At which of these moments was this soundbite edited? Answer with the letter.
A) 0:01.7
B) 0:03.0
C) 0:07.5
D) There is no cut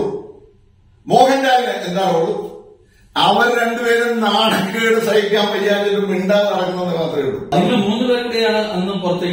C